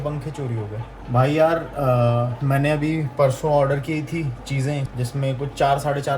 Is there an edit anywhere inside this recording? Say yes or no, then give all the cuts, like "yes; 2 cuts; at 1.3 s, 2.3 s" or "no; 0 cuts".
yes; 2 cuts; at 0.9 s, 4.9 s